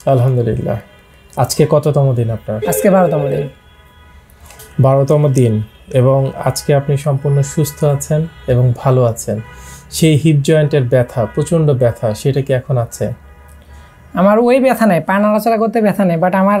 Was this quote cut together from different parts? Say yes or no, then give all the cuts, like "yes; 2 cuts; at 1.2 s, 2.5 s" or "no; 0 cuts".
no; 0 cuts